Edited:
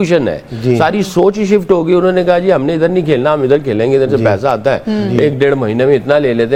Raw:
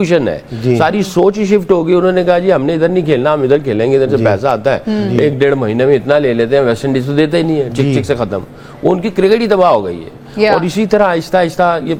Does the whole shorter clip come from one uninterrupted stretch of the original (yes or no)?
yes